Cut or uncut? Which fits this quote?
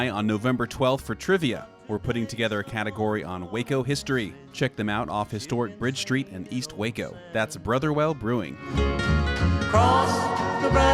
cut